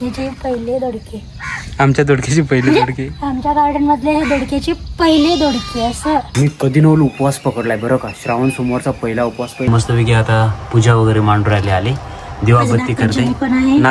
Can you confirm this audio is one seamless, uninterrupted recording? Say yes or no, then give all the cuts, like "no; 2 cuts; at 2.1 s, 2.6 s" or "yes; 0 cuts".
no; 2 cuts; at 6.3 s, 9.7 s